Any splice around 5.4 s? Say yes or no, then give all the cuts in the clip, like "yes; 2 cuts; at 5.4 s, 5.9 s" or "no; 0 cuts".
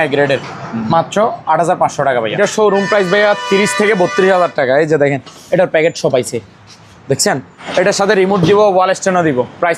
no; 2 cuts; at 2.4 s, 7.5 s